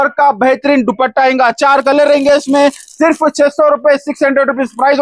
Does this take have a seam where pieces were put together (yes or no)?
no